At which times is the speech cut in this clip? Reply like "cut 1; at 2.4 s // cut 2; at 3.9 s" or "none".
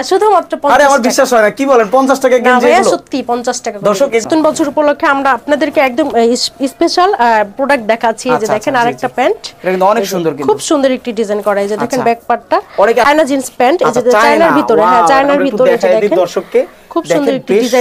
cut 1; at 4.2 s // cut 2; at 13.1 s